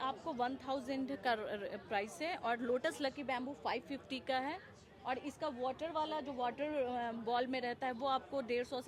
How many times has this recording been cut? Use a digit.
0